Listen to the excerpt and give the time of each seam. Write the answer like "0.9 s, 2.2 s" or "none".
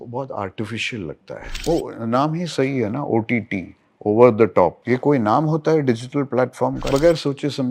1.5 s, 4.8 s, 6.9 s